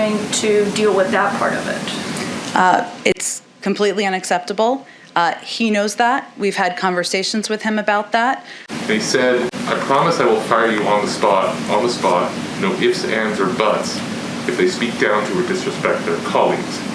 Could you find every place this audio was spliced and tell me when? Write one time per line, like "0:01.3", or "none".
0:08.6